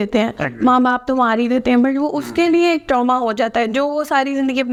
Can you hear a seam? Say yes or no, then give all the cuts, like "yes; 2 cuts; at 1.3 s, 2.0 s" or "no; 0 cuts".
no; 0 cuts